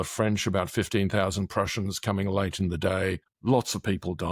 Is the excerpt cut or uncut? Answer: cut